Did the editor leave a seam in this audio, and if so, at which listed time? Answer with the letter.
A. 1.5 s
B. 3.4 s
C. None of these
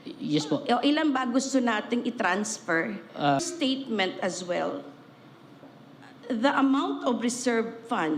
B